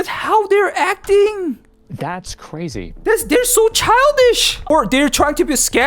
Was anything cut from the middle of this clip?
yes; 1 cut; at 4.7 s

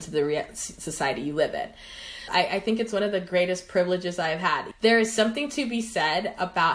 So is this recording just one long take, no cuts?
no; 2 cuts; at 2.2 s, 4.7 s

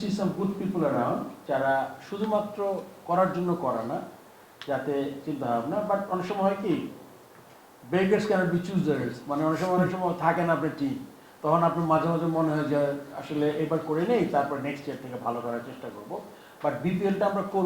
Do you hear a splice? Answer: no; 0 cuts

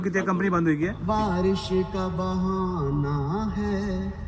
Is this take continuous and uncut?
no; 1 cut; at 1.0 s

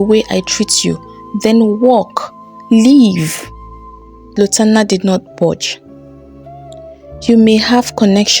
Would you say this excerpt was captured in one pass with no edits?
no; 1 cut; at 4.3 s

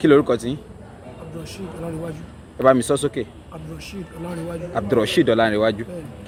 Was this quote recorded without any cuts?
yes; 0 cuts

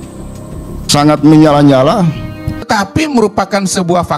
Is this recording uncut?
no; 1 cut; at 2.7 s

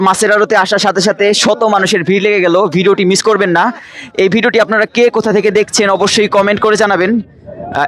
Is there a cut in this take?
no; 0 cuts

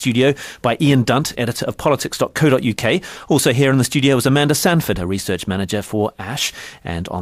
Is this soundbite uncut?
no; 1 cut; at 2.8 s

